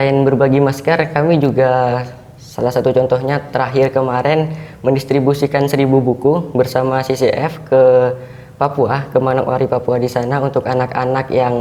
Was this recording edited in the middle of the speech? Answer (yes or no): no